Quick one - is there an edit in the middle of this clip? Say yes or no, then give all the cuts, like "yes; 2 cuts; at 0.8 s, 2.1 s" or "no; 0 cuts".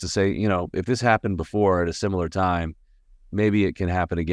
no; 0 cuts